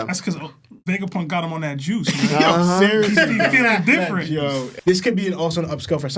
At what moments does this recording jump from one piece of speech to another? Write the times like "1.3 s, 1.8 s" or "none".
4.7 s